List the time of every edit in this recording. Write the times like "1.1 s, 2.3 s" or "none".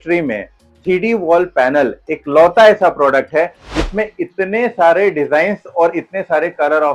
none

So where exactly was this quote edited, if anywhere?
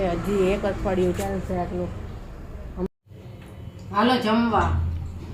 2.9 s

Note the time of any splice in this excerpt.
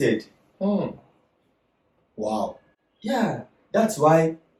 none

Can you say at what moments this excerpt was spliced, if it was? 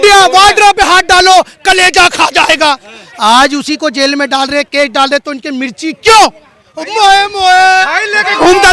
none

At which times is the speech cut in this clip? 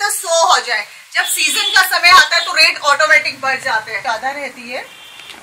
3.9 s

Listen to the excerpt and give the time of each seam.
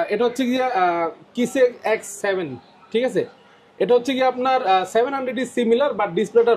none

